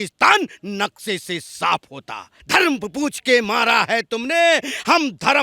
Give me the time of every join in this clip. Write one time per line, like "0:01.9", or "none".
0:02.3